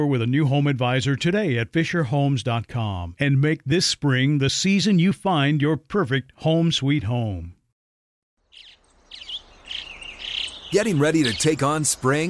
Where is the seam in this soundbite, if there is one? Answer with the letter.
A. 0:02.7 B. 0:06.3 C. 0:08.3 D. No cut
C